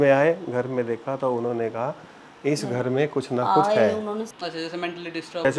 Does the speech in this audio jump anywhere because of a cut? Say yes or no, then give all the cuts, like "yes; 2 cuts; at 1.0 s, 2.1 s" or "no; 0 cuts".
yes; 1 cut; at 4.3 s